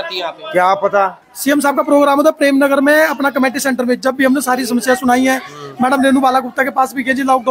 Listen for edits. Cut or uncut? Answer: cut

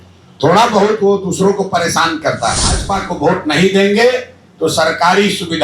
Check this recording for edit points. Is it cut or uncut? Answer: cut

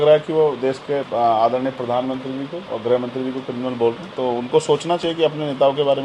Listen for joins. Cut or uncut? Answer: uncut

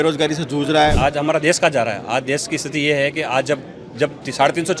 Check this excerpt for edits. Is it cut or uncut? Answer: cut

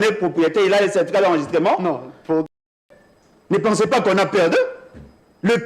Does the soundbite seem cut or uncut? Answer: cut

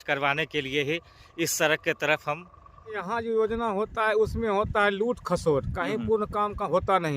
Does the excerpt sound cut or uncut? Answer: cut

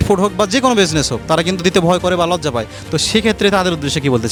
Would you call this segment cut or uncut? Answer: uncut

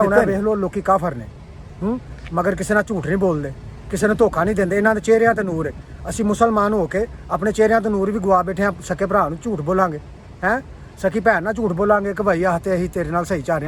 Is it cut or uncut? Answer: uncut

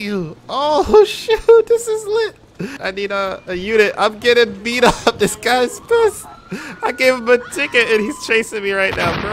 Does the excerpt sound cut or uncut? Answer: cut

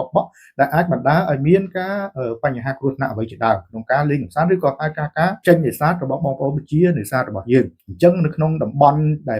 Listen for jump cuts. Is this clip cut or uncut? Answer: cut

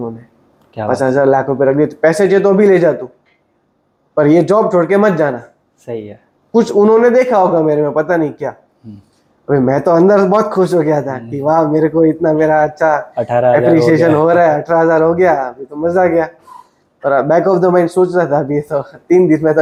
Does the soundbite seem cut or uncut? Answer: uncut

